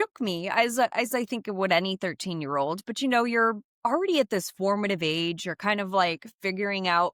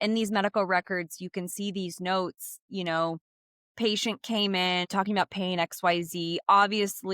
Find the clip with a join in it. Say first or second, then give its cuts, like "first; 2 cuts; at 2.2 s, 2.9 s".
second; 1 cut; at 4.9 s